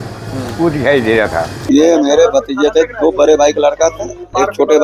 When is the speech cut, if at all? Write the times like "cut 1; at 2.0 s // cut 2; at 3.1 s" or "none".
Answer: cut 1; at 1.6 s